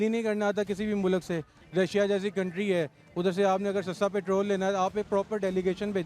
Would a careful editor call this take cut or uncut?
cut